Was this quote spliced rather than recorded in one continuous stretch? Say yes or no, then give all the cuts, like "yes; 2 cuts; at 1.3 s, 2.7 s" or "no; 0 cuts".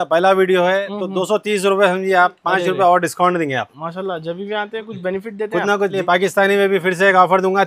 yes; 1 cut; at 5.9 s